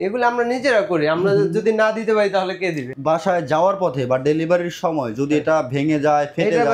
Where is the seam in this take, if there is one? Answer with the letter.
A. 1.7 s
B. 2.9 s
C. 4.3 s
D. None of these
B